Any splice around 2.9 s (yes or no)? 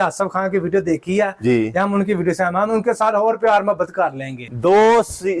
no